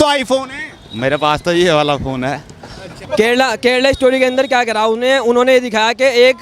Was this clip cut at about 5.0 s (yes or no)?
no